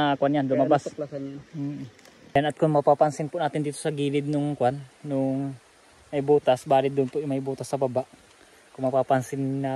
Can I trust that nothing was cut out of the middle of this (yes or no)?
no